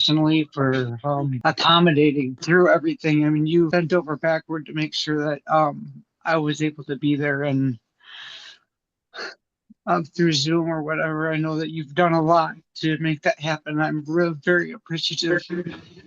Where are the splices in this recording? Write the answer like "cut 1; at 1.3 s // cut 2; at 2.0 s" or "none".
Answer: cut 1; at 1.3 s // cut 2; at 2.4 s // cut 3; at 3.7 s